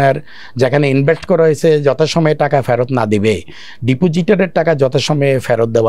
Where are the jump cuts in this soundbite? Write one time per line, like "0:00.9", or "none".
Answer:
none